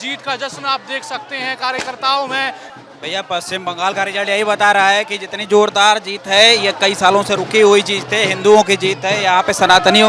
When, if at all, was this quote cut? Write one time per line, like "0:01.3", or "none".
0:02.7